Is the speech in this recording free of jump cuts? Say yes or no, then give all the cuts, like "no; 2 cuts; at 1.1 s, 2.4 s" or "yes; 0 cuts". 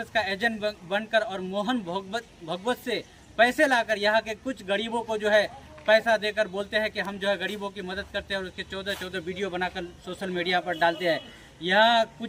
yes; 0 cuts